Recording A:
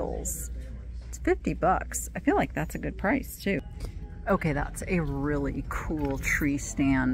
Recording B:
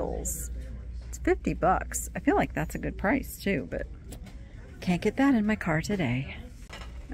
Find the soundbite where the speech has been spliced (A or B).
A